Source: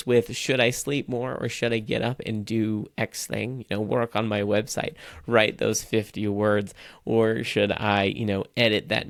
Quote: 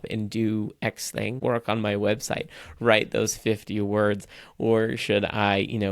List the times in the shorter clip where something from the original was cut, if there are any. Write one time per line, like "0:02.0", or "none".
0:01.4